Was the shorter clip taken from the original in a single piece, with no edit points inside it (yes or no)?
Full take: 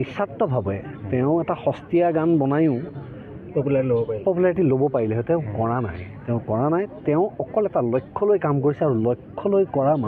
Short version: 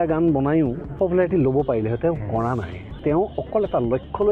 no